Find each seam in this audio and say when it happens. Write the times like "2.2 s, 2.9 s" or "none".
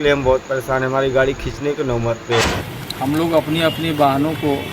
2.4 s